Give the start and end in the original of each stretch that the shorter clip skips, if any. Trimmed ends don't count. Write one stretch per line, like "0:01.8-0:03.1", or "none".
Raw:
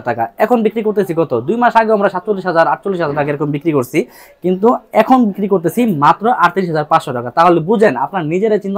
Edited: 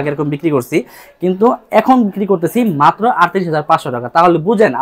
none